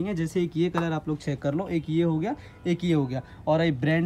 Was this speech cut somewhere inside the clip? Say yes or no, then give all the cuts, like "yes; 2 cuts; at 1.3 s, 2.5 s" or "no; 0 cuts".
no; 0 cuts